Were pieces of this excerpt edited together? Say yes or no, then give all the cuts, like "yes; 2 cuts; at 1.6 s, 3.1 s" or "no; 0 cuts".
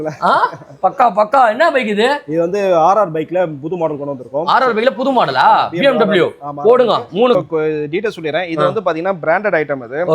yes; 1 cut; at 7.3 s